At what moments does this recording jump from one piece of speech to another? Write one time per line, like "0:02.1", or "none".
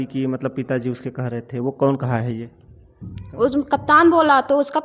none